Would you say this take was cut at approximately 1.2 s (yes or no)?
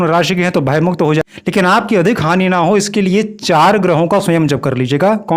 yes